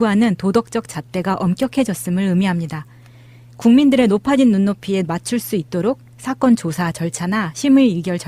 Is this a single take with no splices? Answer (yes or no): no